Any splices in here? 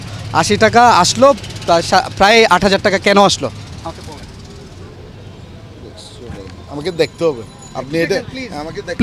no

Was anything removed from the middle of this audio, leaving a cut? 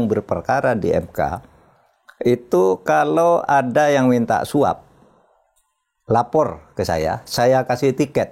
no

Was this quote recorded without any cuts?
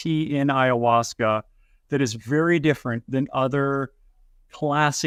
yes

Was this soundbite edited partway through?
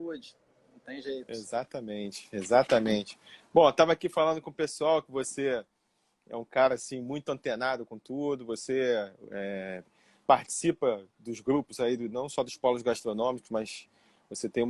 yes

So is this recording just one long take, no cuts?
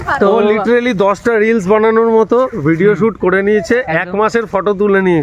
no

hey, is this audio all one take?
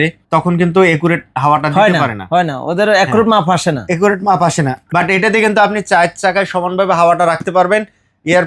yes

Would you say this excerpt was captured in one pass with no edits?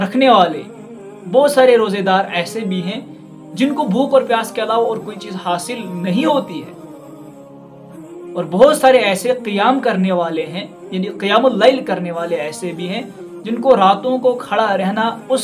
yes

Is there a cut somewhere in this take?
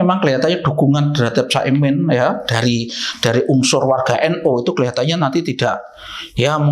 no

